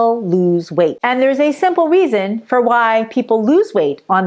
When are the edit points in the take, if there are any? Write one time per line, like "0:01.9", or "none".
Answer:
none